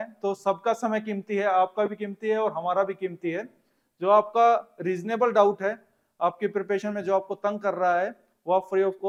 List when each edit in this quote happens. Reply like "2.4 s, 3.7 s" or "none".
none